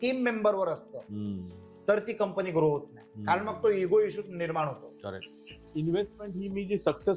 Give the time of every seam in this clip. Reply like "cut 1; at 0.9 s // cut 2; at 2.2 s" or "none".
cut 1; at 5.7 s